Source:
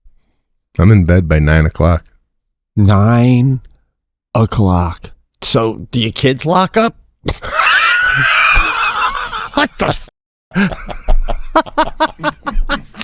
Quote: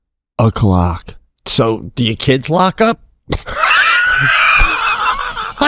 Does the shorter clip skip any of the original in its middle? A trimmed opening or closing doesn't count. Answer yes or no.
no